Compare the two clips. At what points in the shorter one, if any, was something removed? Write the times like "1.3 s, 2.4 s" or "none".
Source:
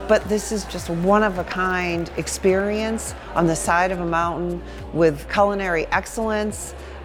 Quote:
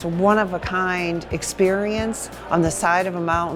none